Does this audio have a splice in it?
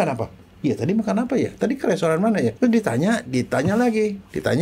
yes; 1 cut; at 2.5 s

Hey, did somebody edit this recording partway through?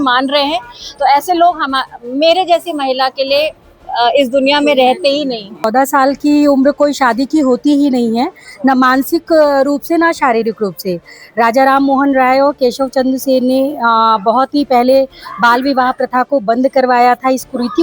yes; 1 cut; at 5.7 s

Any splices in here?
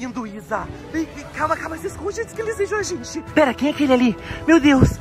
yes; 1 cut; at 3.2 s

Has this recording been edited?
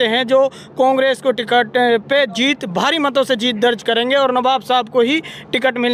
no; 0 cuts

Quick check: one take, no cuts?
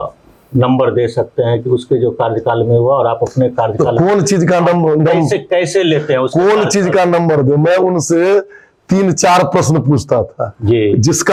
yes; 0 cuts

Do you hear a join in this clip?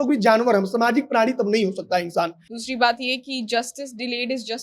yes; 1 cut; at 2.5 s

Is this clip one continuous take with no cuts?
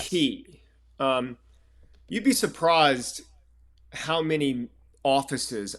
no; 1 cut; at 4.8 s

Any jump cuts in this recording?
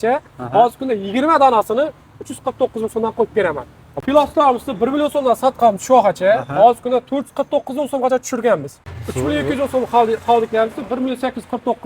yes; 2 cuts; at 4.0 s, 8.8 s

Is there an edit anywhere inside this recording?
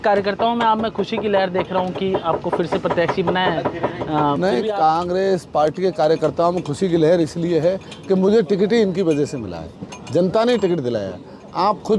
no; 0 cuts

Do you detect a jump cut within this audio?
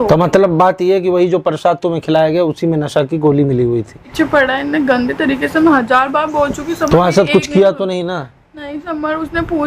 yes; 1 cut; at 4.1 s

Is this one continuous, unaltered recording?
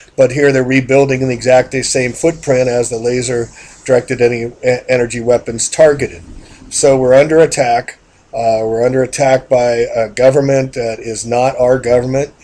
yes; 0 cuts

